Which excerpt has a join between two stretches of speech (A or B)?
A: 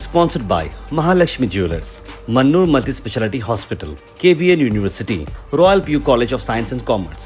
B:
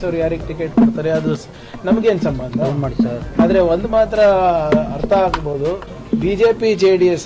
B